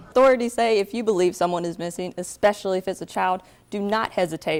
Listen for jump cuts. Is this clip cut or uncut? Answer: uncut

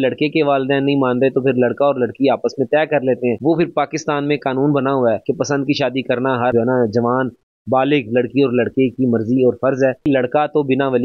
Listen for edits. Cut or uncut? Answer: cut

